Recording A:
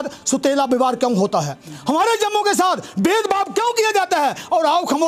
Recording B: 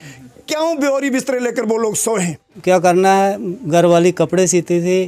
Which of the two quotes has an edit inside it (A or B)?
B